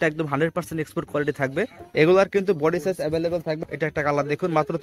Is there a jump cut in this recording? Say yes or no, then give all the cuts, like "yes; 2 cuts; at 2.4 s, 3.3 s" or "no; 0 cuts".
yes; 2 cuts; at 1.8 s, 3.6 s